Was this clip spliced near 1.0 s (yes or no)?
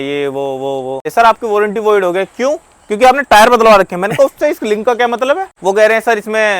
yes